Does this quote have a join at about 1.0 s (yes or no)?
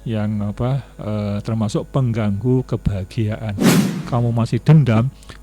no